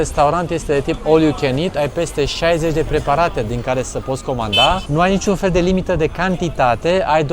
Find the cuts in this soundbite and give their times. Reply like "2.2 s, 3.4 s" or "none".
4.8 s